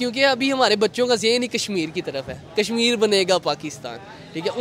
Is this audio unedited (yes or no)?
yes